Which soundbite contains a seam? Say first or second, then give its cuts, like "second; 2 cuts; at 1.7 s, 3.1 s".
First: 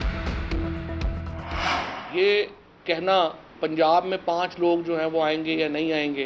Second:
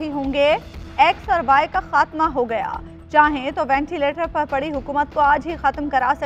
first; 1 cut; at 1.5 s